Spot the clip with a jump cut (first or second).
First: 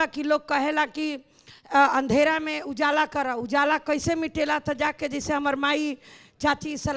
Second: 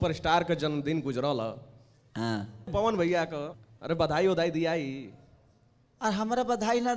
second